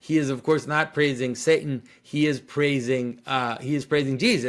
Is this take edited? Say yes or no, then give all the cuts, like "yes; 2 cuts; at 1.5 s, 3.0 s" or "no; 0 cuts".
no; 0 cuts